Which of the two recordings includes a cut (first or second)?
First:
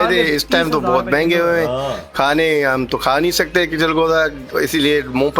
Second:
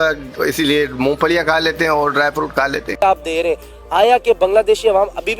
second